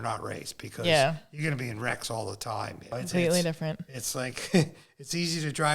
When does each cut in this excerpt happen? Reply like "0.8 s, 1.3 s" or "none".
2.9 s